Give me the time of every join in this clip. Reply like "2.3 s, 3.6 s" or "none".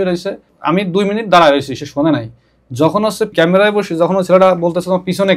3.3 s